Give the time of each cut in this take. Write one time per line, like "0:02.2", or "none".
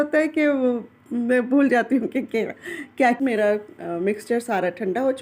0:03.2

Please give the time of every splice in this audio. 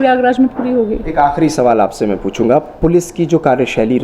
none

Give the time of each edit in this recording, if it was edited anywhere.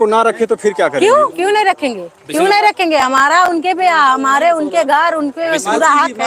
none

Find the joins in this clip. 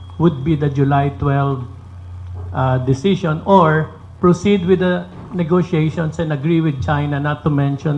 none

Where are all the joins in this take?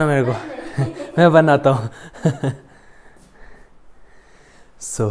none

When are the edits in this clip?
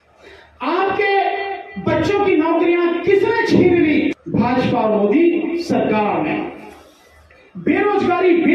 0:04.2

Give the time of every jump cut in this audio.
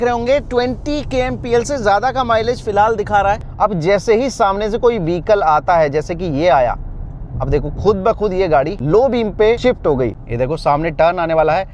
0:03.4
0:08.8
0:10.2

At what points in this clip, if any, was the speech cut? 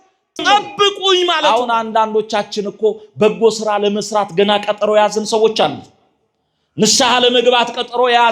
0:01.4

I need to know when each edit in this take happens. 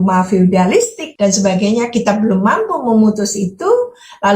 0:01.0

